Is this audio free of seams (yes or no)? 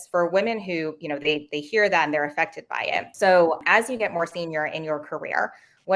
yes